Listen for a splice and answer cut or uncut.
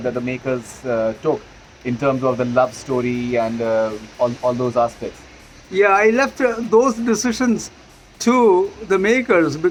uncut